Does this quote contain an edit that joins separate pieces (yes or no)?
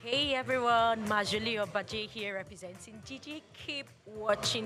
no